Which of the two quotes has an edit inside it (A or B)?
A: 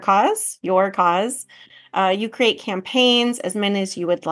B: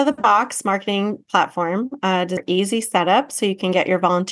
B